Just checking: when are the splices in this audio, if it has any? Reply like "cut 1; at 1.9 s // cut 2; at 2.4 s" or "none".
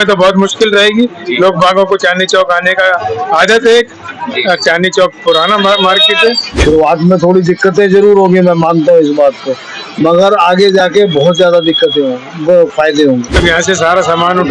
cut 1; at 6.5 s // cut 2; at 13.4 s